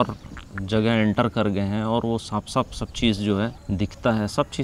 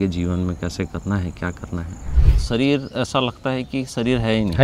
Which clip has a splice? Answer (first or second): second